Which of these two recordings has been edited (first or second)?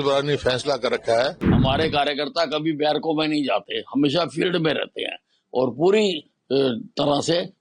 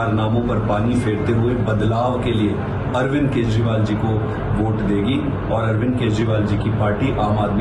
first